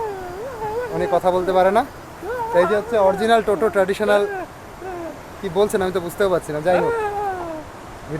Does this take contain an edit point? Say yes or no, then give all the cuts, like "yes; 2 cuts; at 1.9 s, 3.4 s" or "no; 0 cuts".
no; 0 cuts